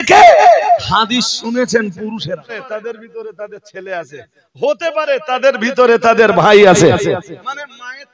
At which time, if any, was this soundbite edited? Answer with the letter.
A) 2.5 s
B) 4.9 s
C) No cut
A